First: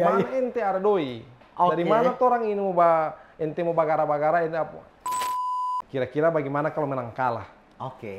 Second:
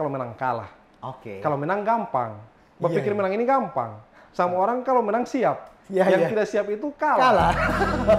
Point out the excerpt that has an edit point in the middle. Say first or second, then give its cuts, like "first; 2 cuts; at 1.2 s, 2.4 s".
first; 1 cut; at 5.4 s